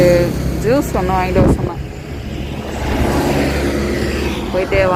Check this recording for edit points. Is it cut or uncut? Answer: uncut